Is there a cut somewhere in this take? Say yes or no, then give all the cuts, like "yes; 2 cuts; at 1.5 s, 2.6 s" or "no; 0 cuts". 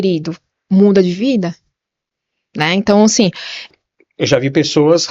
yes; 1 cut; at 3.6 s